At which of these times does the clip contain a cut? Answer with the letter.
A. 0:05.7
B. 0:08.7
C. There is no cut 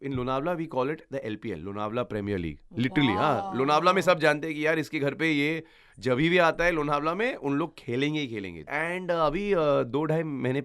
B